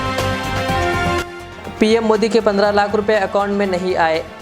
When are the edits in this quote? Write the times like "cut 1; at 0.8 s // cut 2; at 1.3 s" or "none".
cut 1; at 1.2 s